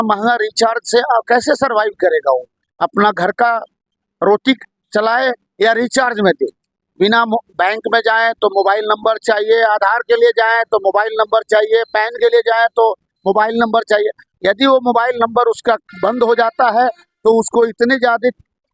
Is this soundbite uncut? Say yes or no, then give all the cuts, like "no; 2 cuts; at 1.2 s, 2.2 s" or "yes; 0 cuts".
yes; 0 cuts